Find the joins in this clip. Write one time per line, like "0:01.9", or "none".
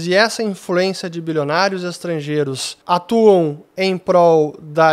none